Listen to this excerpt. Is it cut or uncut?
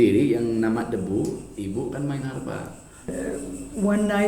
cut